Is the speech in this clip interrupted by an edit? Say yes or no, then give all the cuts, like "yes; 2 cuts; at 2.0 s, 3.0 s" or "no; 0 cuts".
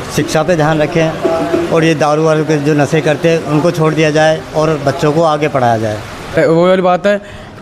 yes; 1 cut; at 6.3 s